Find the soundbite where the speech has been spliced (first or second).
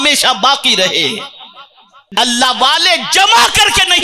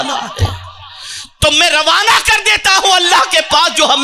first